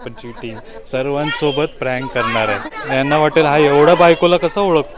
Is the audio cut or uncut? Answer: cut